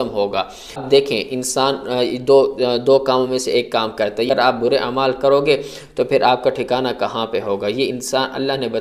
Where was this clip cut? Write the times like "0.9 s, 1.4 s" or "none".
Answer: 0.8 s, 4.3 s